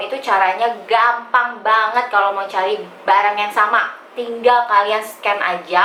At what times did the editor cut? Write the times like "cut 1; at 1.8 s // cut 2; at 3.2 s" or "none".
none